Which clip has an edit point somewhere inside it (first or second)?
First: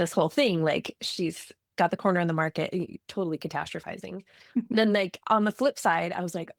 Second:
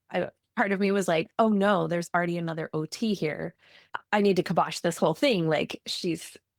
second